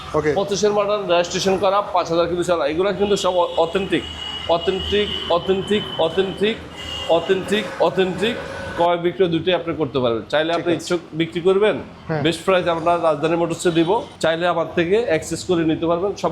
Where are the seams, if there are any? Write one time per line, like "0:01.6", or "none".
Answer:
0:08.7
0:14.1